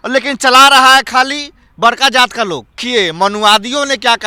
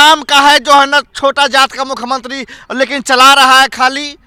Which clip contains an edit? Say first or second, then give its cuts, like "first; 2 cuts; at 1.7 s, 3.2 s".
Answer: first; 1 cut; at 2.7 s